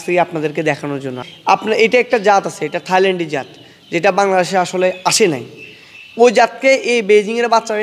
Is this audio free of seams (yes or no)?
no